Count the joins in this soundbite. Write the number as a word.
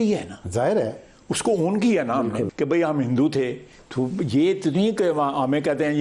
one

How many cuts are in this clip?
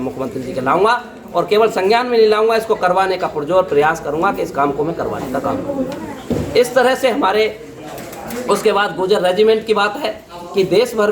one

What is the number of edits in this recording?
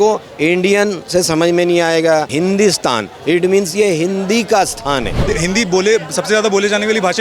two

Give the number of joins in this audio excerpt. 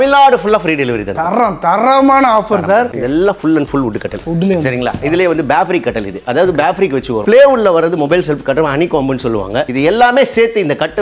four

